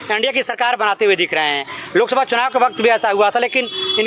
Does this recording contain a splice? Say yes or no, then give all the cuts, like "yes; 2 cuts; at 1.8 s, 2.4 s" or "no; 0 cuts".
no; 0 cuts